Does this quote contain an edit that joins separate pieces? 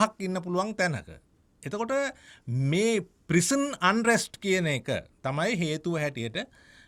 no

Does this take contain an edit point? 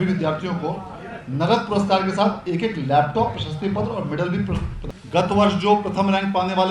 yes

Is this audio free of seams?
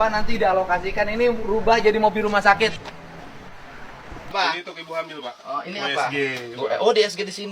no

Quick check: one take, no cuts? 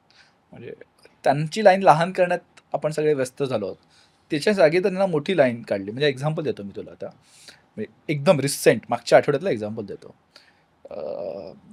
yes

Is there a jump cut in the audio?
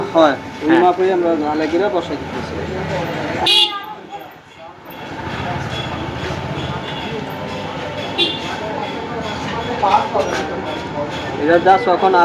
no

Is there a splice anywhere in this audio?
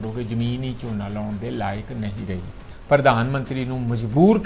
yes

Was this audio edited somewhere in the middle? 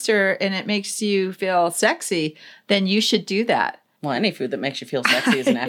yes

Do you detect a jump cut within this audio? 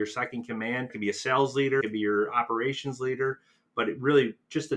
yes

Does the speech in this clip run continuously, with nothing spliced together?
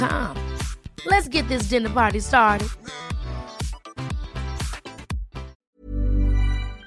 no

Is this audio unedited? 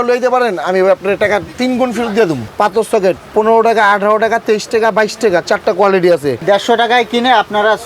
no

